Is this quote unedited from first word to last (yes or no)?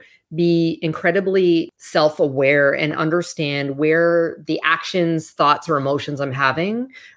no